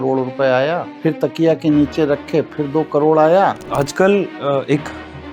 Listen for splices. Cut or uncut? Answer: cut